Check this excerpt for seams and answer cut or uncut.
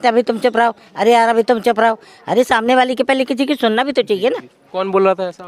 uncut